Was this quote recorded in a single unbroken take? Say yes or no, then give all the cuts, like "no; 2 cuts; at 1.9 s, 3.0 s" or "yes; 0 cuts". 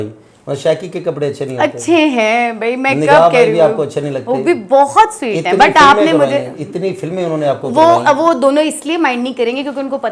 yes; 0 cuts